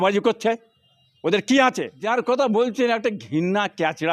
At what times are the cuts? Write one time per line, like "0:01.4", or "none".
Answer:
0:01.9

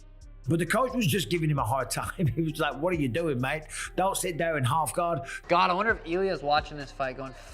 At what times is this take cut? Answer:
0:05.3

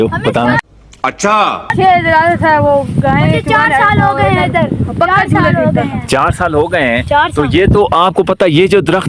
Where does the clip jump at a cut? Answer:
none

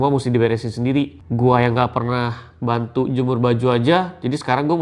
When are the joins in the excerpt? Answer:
none

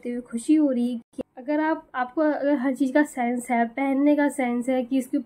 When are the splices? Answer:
0:01.1

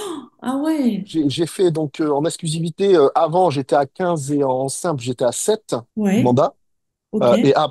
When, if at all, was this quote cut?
0:01.1
0:05.9

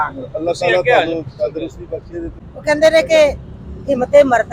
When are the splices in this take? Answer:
0:02.4

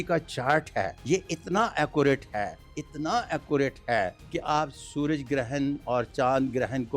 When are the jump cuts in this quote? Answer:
0:01.0
0:04.2

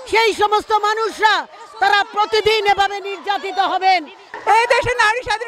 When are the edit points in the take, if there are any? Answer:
0:04.3

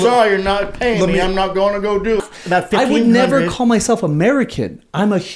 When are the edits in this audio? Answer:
0:02.2

